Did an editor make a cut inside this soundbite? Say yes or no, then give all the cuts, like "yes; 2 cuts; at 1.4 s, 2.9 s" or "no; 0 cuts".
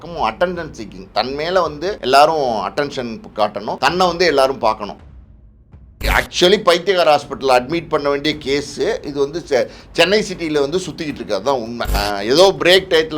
yes; 4 cuts; at 2.0 s, 3.8 s, 5.4 s, 11.9 s